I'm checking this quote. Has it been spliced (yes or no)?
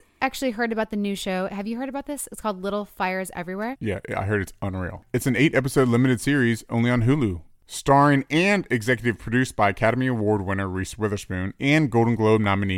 yes